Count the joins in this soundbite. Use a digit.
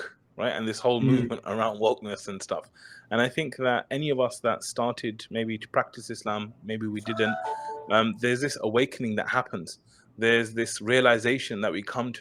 0